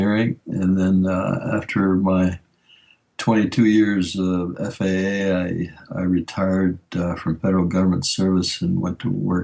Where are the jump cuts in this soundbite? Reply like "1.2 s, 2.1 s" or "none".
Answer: none